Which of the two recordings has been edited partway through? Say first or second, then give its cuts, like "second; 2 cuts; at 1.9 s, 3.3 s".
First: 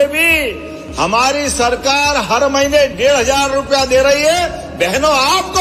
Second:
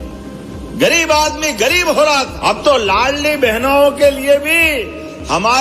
second; 1 cut; at 2.3 s